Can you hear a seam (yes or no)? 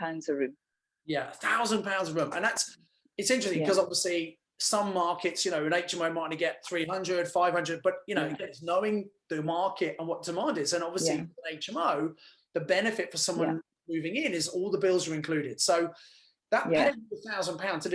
no